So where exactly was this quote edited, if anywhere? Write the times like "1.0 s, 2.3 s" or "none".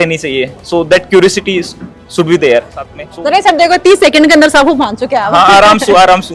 3.0 s